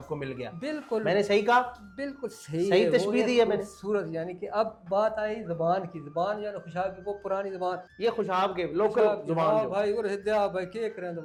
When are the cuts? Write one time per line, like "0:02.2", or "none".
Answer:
none